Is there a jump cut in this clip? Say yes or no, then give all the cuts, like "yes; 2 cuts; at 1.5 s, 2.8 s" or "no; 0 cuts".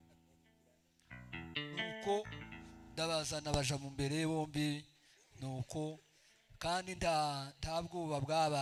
no; 0 cuts